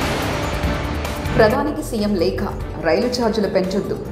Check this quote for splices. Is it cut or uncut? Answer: cut